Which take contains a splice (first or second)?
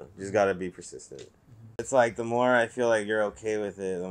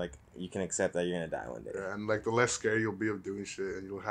first